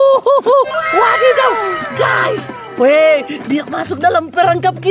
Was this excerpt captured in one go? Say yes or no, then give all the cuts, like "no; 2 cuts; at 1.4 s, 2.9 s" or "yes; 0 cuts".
yes; 0 cuts